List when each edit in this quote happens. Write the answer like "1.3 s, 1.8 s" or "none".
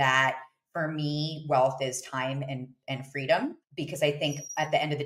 3.6 s

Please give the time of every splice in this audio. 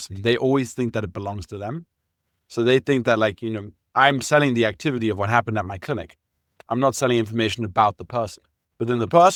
none

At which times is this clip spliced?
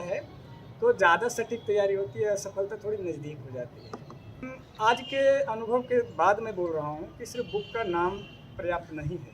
4.6 s

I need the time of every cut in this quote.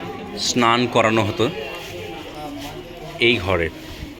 none

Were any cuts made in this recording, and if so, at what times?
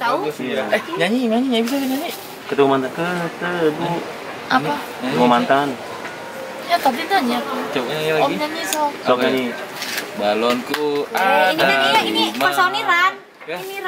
none

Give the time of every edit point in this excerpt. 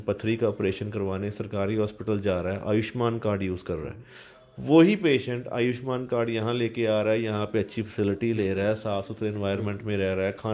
none

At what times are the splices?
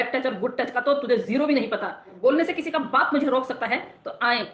2.1 s

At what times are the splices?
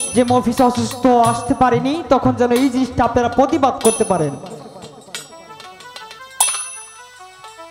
none

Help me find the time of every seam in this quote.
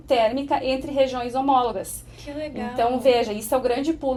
none

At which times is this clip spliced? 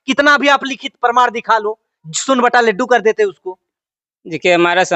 none

